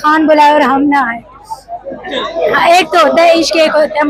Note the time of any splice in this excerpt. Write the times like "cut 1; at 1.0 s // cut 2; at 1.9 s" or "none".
none